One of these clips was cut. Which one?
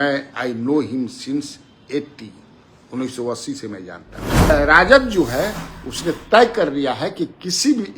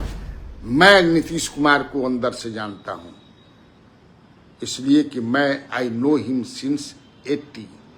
first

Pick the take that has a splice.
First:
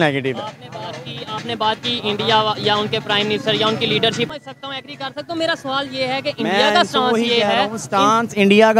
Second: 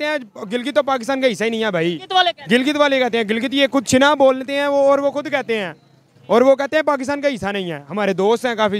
first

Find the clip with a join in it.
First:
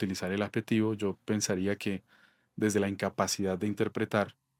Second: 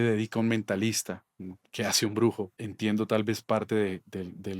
second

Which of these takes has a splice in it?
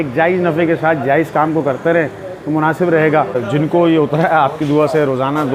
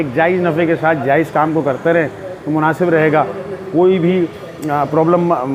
first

